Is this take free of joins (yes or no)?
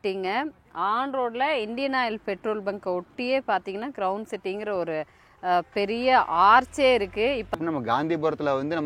no